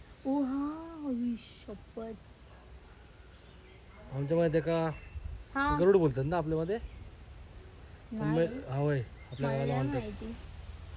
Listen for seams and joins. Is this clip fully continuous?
yes; 0 cuts

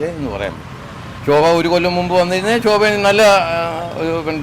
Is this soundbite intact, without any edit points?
yes; 0 cuts

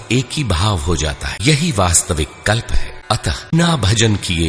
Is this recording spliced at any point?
yes; 2 cuts; at 1.3 s, 3.5 s

